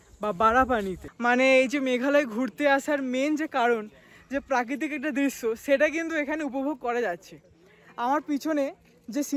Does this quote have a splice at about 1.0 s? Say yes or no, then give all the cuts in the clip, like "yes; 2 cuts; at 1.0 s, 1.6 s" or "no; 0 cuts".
yes; 1 cut; at 1.0 s